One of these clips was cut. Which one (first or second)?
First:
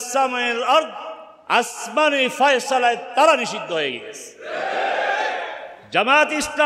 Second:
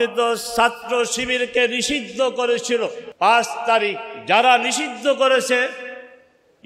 second